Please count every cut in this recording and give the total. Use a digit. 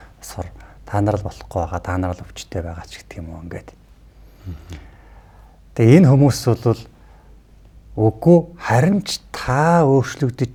0